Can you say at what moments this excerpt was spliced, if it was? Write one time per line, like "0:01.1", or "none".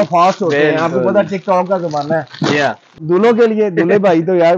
0:02.9